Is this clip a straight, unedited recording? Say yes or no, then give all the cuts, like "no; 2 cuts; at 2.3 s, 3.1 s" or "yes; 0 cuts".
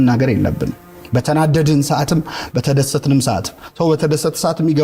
yes; 0 cuts